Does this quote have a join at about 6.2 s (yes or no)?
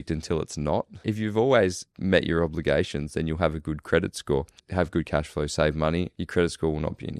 yes